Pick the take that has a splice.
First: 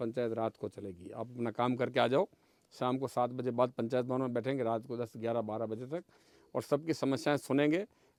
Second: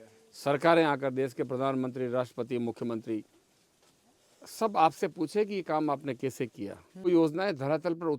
second; 1 cut; at 7.1 s

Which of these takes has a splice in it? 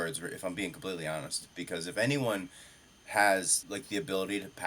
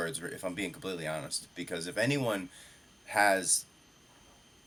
first; 1 cut; at 3.6 s

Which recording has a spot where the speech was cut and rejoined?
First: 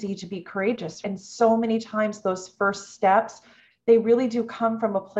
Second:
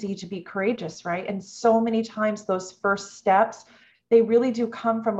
first; 1 cut; at 1.0 s

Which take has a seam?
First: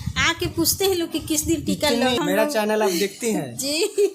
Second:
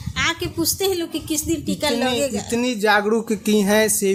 first; 1 cut; at 2.2 s

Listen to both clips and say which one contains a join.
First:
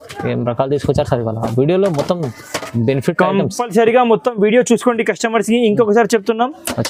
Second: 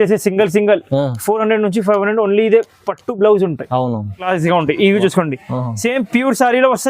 second; 1 cut; at 4.3 s

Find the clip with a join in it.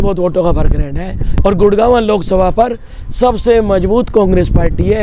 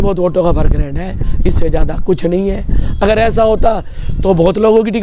first; 1 cut; at 1.2 s

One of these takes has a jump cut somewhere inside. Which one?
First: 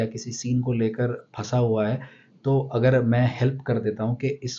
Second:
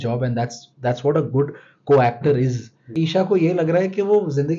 second; 1 cut; at 2.9 s

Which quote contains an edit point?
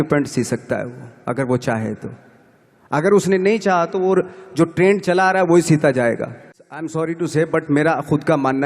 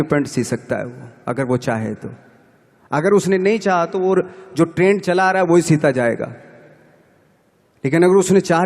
first; 1 cut; at 6.8 s

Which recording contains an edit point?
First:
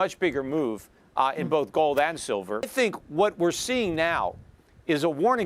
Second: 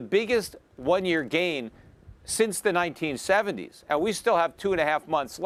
first; 1 cut; at 2.7 s

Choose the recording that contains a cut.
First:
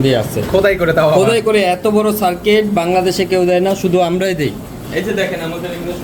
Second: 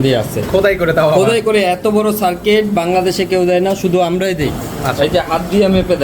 second; 1 cut; at 4.7 s

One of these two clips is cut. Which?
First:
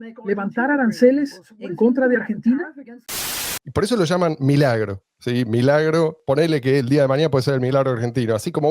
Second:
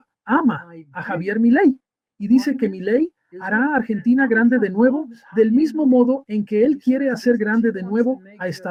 first; 1 cut; at 3.4 s

